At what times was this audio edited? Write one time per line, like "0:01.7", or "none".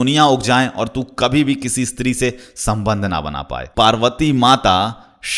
0:03.7